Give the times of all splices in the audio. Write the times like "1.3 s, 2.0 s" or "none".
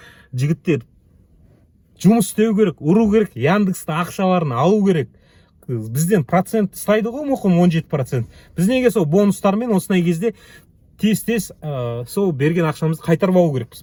none